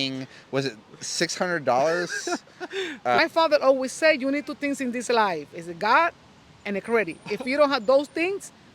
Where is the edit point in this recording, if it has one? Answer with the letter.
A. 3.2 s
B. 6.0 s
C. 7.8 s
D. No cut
A